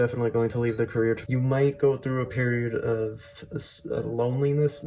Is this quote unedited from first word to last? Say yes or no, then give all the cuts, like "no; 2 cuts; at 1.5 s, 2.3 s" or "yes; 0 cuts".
no; 1 cut; at 1.2 s